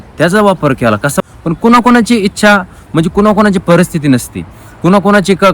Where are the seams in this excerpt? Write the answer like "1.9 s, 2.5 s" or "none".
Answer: 1.1 s